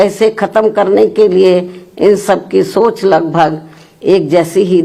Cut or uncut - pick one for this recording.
uncut